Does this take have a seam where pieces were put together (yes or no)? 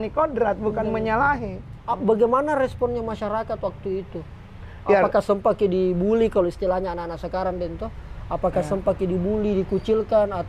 no